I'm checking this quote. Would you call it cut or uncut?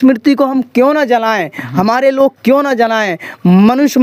uncut